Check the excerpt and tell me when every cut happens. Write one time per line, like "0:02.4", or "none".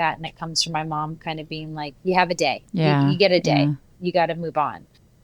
0:02.6
0:03.9